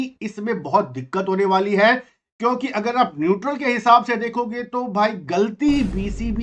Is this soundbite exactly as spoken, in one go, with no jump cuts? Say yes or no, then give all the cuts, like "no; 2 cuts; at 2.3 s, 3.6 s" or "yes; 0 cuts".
yes; 0 cuts